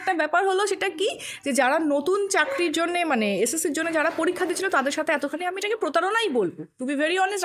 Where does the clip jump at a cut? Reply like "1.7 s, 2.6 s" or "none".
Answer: none

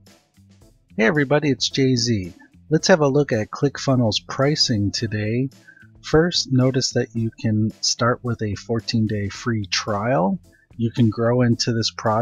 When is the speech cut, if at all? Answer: 1.0 s

